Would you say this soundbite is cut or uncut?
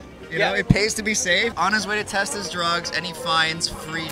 cut